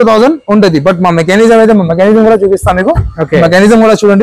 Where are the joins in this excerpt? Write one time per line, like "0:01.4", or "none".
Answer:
none